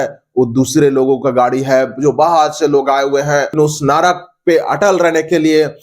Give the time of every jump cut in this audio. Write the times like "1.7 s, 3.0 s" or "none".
3.6 s